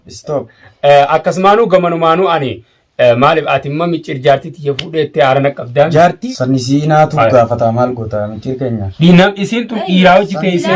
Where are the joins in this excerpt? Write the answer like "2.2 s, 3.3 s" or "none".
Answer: 6.2 s